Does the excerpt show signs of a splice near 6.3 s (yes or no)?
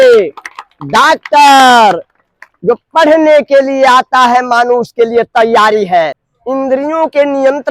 yes